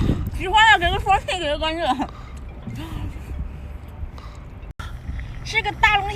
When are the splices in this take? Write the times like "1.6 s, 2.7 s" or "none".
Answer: 4.7 s